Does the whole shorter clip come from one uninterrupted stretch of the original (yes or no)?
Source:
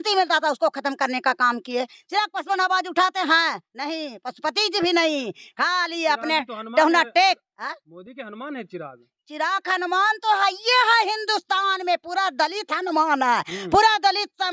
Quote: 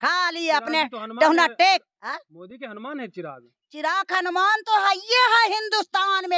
yes